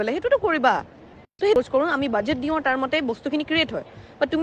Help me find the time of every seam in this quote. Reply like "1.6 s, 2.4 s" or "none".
1.6 s